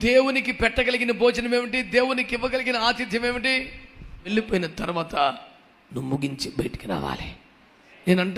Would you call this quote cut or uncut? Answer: cut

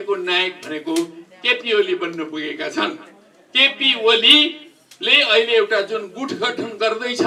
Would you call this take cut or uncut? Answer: uncut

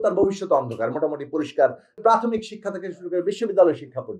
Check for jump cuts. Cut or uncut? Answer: cut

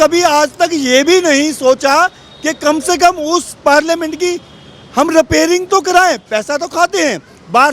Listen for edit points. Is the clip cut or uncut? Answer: uncut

